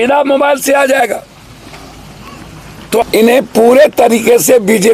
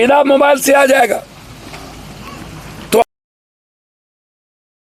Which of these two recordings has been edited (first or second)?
first